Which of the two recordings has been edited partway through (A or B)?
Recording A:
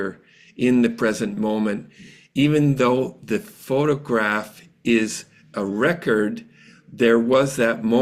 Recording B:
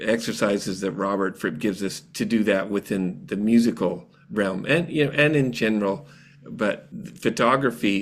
B